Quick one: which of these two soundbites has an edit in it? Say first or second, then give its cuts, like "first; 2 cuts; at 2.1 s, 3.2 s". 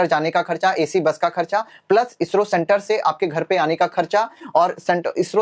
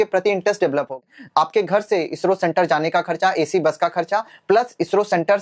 second; 1 cut; at 1.0 s